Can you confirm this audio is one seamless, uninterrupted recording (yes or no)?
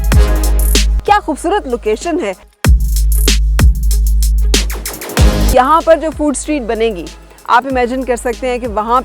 no